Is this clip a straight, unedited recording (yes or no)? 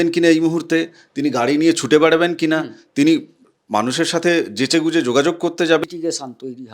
no